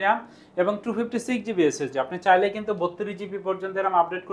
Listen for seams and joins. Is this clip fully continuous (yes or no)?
yes